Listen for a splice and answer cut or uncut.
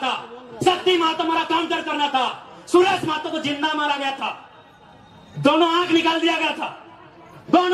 uncut